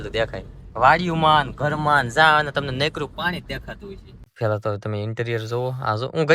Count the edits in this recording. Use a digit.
1